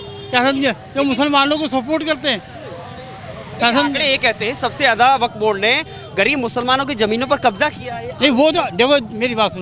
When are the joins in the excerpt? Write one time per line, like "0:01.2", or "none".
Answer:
none